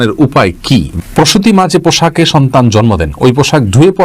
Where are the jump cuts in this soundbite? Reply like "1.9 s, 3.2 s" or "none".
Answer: 1.0 s